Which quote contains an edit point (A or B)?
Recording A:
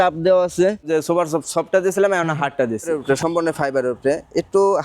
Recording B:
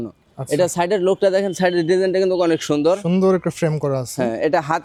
A